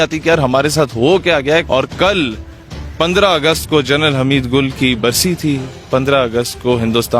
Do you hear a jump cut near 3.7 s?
no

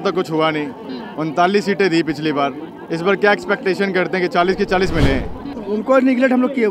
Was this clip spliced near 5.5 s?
yes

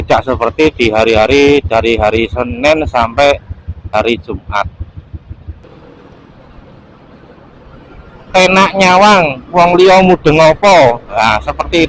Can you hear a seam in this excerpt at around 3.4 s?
no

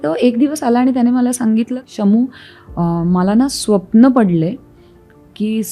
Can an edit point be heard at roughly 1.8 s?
yes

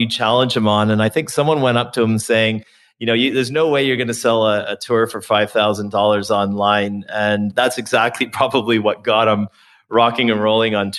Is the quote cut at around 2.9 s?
no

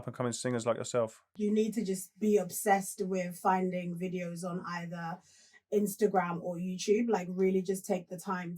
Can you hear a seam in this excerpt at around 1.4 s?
yes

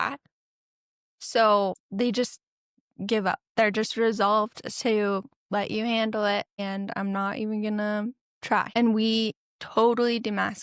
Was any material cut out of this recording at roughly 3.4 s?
no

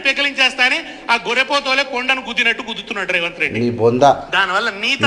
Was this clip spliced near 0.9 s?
no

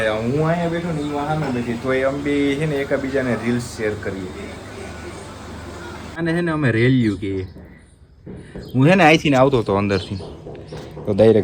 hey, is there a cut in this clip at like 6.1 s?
yes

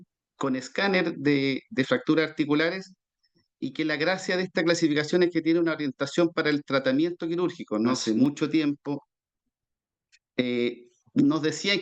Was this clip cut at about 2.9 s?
no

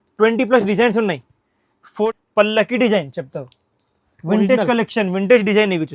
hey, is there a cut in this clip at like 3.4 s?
no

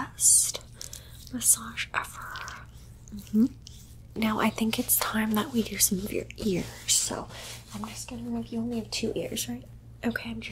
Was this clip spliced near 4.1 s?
yes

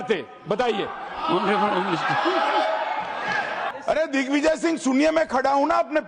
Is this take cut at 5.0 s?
no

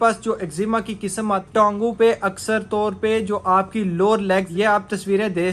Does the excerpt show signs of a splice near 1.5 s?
yes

